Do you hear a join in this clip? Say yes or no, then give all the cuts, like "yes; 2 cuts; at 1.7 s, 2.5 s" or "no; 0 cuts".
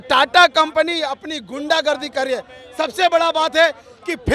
no; 0 cuts